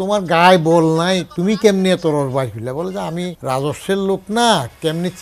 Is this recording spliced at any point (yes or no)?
yes